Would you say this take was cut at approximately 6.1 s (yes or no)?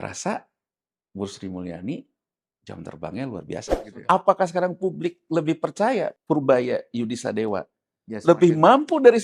yes